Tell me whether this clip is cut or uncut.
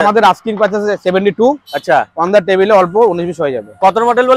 uncut